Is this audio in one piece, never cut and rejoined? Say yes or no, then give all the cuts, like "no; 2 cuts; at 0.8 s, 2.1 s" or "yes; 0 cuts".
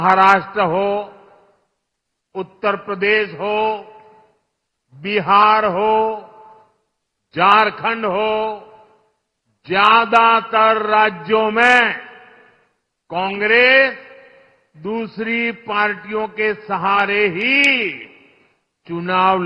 yes; 0 cuts